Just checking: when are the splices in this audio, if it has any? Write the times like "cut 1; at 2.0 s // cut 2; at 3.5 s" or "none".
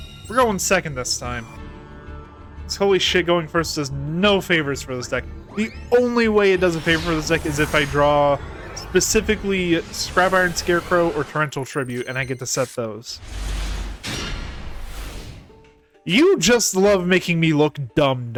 none